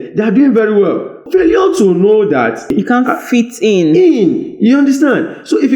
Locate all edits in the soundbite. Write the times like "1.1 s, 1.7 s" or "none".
1.2 s, 2.7 s